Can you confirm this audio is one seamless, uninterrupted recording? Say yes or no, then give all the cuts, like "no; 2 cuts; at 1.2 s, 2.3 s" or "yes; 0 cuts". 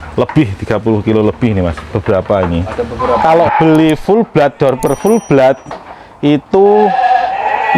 no; 1 cut; at 3.1 s